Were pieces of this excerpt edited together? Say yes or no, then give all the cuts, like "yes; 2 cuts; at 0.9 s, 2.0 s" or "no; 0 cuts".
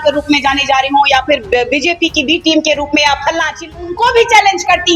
yes; 1 cut; at 3.8 s